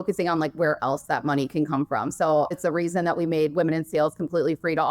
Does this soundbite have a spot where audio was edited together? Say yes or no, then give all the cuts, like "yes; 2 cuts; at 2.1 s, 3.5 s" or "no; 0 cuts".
yes; 1 cut; at 2.5 s